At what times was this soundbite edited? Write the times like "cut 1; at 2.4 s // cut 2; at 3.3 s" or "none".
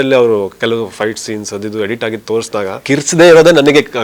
cut 1; at 2.8 s